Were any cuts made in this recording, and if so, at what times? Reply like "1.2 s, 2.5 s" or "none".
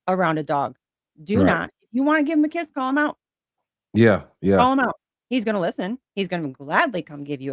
none

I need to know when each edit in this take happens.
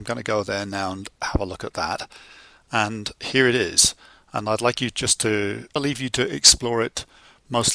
none

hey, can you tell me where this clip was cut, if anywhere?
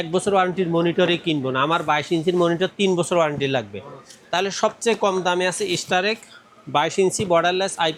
none

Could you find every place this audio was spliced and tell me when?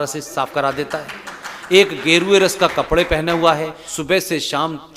3.8 s

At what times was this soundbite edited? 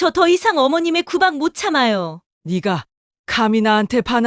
none

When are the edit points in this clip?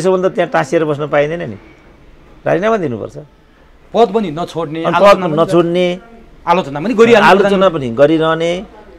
none

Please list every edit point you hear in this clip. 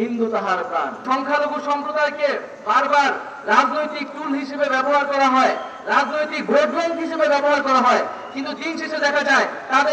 1.0 s

